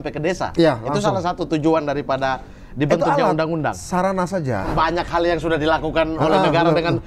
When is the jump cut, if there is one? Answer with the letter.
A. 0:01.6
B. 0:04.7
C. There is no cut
B